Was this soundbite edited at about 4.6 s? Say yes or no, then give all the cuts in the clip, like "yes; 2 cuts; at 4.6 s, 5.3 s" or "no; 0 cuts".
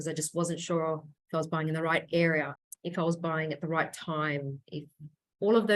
no; 2 cuts; at 1.1 s, 2.6 s